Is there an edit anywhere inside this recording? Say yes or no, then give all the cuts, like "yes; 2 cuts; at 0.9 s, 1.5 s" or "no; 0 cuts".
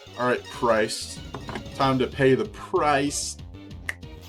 no; 0 cuts